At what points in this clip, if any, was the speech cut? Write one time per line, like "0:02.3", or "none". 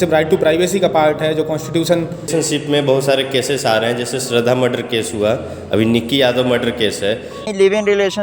0:02.3
0:07.5